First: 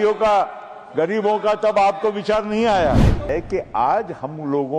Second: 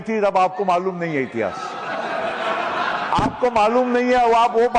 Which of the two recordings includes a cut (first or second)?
first